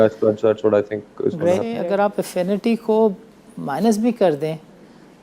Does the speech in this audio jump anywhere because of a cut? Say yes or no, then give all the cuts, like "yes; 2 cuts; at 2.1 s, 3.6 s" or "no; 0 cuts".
yes; 1 cut; at 1.7 s